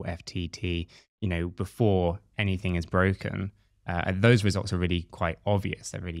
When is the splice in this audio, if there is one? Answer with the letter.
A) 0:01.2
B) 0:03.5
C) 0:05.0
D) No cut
D